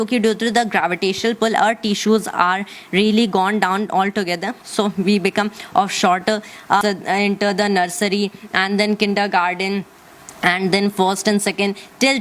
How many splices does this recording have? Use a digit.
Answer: 1